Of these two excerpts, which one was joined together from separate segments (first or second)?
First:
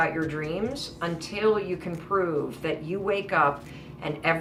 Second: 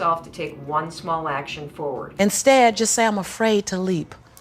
second